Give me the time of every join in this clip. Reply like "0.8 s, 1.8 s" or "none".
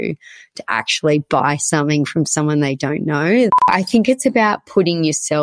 3.7 s